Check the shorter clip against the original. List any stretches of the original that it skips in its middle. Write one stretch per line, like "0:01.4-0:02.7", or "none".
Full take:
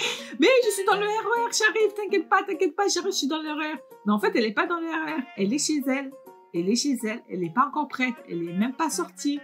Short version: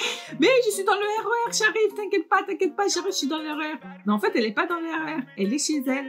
none